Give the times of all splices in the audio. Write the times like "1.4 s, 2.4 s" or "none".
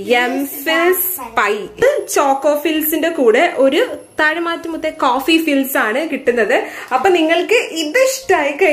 1.8 s